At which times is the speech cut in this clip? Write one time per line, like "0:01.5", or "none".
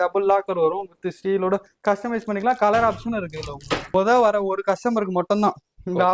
0:03.9